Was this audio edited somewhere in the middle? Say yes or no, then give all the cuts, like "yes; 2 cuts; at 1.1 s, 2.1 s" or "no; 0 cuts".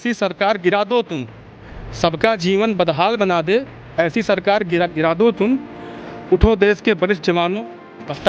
no; 0 cuts